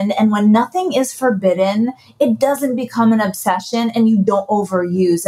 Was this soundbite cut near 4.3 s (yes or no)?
yes